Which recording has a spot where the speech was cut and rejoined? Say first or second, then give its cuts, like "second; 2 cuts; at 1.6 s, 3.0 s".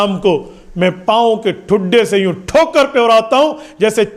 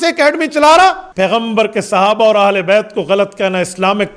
second; 1 cut; at 1.1 s